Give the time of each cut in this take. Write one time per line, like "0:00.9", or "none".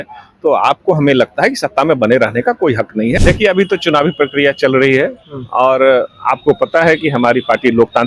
0:03.2